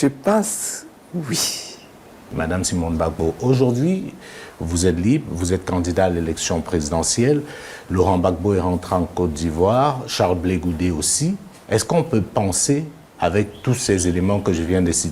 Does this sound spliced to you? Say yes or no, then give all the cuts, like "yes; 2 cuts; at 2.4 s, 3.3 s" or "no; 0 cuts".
yes; 1 cut; at 2.3 s